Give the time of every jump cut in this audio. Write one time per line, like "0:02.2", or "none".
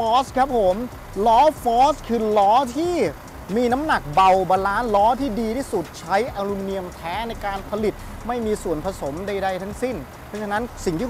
none